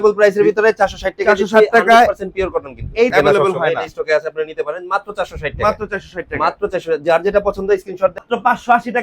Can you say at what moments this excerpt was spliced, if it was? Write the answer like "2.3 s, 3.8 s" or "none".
3.1 s, 8.2 s